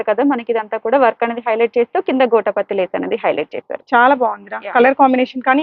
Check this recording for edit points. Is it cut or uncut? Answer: uncut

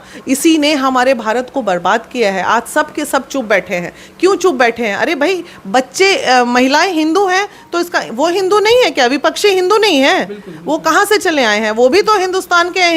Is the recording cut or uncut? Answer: uncut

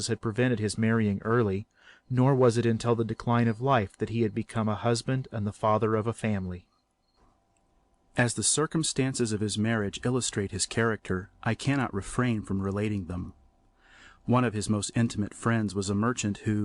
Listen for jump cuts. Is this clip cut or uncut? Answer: cut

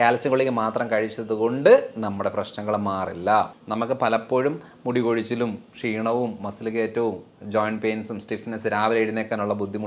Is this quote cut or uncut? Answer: cut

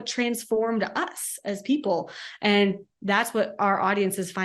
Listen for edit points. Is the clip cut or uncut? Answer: uncut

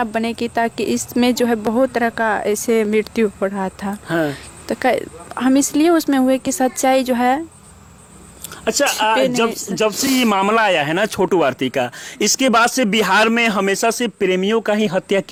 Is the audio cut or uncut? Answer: uncut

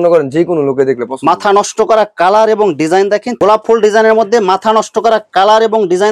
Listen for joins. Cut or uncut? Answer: cut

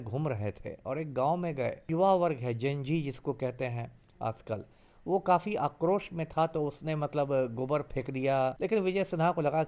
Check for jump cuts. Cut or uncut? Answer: cut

